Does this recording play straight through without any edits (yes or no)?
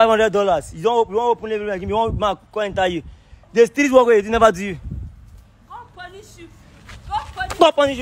yes